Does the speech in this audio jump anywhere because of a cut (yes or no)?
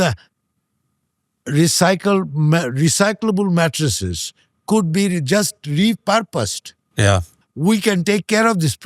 yes